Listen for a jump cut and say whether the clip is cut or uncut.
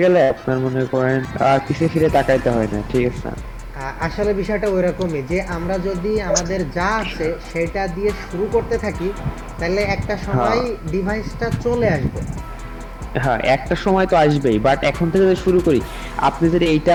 uncut